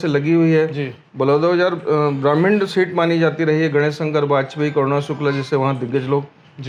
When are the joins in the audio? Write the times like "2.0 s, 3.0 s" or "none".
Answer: none